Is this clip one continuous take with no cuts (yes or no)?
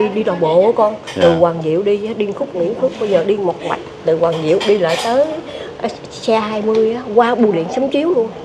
yes